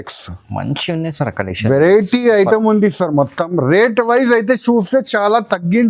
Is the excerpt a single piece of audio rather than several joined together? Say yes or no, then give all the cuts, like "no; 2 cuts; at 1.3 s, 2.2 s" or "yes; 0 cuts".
yes; 0 cuts